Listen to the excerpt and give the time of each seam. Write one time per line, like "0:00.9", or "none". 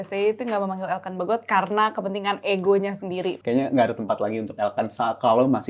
0:03.3